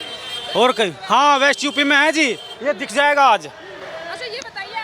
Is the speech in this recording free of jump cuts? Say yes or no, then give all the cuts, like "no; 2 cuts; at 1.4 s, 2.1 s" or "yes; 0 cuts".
yes; 0 cuts